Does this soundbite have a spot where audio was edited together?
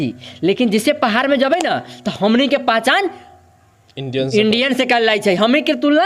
no; 0 cuts

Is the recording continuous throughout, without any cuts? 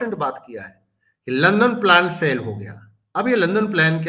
yes; 0 cuts

